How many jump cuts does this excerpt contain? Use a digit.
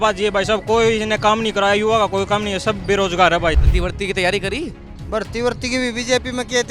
1